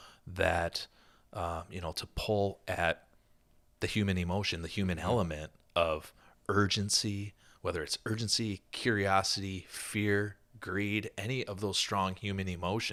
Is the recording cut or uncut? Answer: uncut